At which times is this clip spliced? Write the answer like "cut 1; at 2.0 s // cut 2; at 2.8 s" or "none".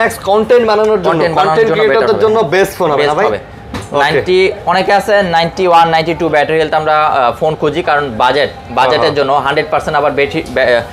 none